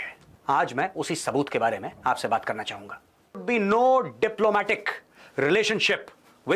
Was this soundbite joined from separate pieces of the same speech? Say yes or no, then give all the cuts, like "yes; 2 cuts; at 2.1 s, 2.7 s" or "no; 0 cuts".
yes; 1 cut; at 3.4 s